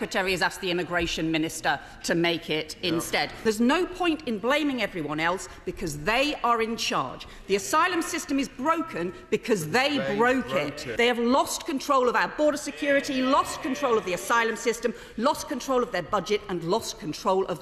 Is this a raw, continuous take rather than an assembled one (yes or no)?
no